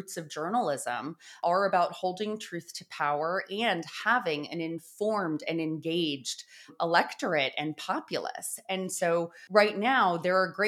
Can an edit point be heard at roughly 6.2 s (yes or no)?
no